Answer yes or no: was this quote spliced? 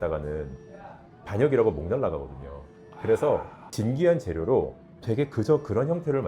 yes